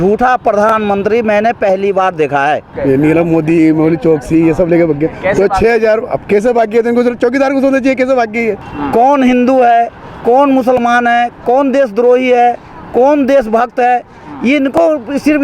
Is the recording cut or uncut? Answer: cut